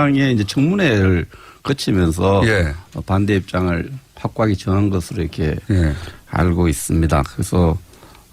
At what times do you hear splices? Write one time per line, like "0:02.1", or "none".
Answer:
0:05.0